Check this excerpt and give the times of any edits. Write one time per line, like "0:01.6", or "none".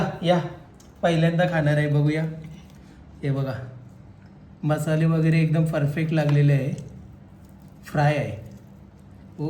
none